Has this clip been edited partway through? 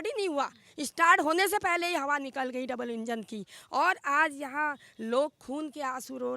no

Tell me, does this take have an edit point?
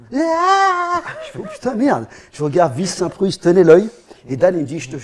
no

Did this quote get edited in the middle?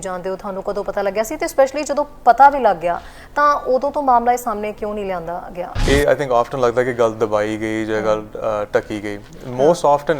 yes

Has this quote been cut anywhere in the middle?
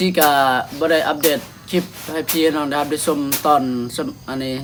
no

